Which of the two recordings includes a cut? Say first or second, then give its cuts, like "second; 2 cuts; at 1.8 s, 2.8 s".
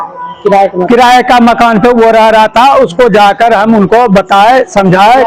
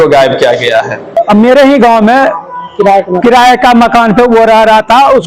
second; 1 cut; at 1.2 s